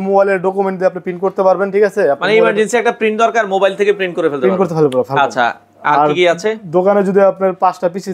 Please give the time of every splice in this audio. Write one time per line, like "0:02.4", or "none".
none